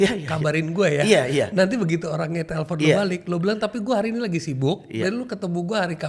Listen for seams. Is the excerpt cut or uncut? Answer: uncut